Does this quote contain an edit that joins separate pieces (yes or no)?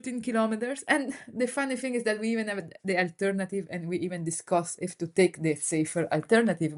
no